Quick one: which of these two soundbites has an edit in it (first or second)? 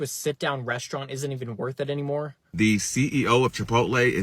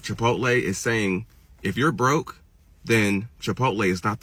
first